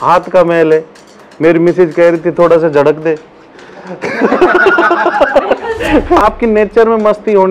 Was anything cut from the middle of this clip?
yes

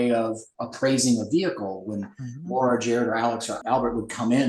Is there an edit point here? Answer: yes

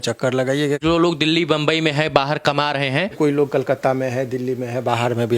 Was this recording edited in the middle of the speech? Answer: yes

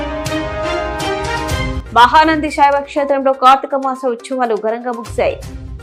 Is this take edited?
no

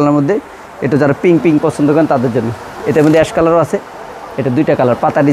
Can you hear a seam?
no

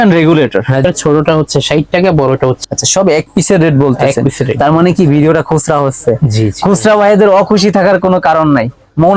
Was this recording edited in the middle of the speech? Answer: yes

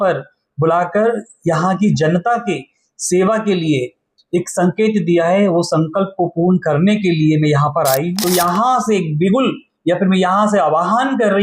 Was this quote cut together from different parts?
yes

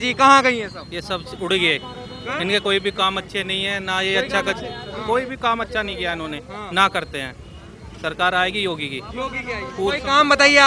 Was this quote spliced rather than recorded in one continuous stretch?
no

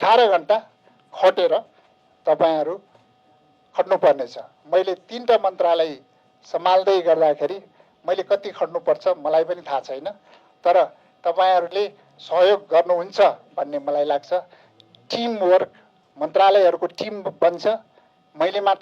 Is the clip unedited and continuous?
yes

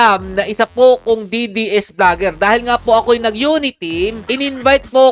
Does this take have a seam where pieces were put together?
yes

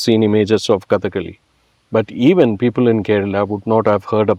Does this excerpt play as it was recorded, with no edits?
yes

